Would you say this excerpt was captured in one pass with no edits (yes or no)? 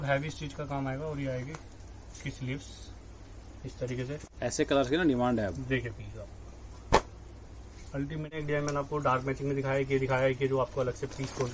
no